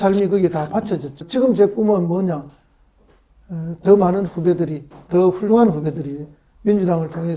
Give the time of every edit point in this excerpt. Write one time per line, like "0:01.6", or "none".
0:01.2